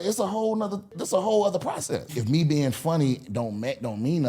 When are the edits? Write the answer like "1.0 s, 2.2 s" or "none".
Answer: 0.9 s, 2.2 s